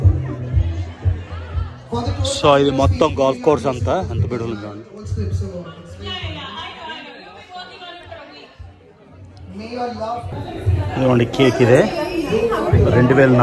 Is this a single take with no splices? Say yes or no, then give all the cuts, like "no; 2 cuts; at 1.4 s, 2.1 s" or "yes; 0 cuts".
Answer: no; 1 cut; at 10.3 s